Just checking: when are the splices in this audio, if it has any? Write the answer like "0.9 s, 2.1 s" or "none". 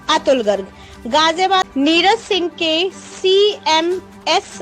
1.7 s